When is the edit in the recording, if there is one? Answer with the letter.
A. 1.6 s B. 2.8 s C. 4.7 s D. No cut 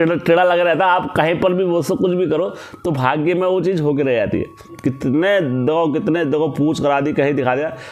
C